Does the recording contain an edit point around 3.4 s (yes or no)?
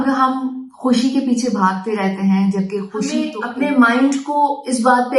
yes